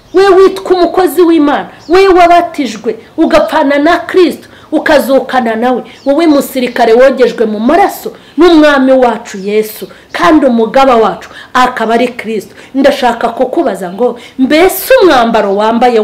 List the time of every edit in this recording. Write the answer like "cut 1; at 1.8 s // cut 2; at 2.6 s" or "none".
none